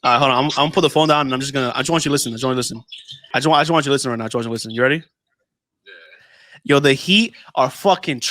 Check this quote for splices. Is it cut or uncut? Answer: cut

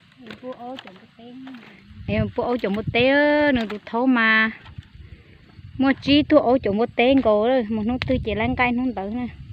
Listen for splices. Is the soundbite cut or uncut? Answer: uncut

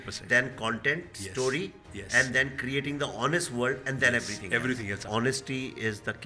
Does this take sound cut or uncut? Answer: cut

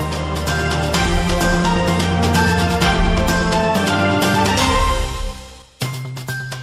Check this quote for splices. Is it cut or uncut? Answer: uncut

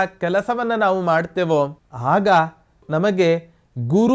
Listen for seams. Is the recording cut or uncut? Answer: cut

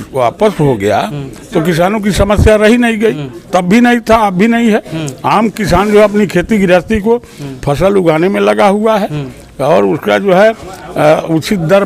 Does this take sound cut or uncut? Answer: uncut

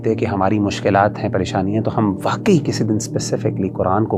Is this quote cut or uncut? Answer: uncut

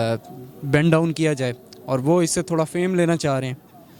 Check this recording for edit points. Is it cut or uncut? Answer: uncut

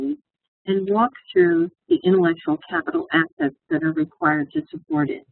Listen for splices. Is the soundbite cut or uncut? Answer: uncut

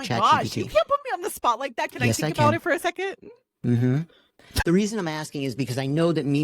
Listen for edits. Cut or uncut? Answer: cut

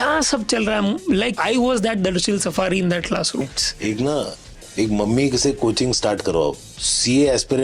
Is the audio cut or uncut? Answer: cut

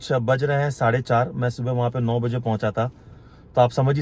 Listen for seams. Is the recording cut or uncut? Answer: uncut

